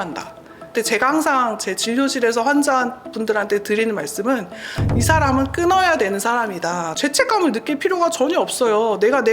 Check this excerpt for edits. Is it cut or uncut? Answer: cut